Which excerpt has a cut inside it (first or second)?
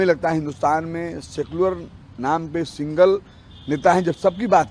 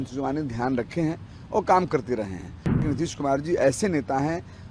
second